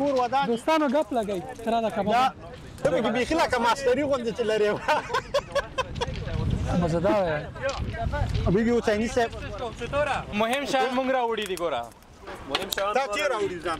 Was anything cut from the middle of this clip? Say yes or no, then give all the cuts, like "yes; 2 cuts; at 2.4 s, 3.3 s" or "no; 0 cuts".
yes; 2 cuts; at 2.8 s, 10.3 s